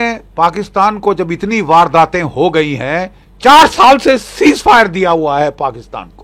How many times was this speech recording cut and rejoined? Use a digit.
1